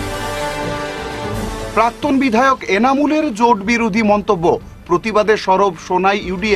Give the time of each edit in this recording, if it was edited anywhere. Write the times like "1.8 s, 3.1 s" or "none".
1.2 s